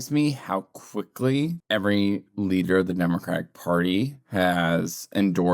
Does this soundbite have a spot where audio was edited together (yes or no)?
yes